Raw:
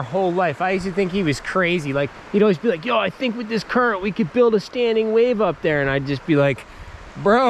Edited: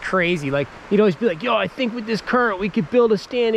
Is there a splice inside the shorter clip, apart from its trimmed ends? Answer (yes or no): no